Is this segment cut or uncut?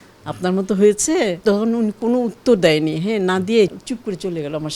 cut